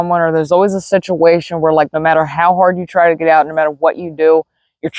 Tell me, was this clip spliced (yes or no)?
no